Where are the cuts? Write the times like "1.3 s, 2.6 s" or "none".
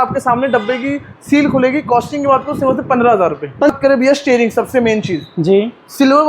3.7 s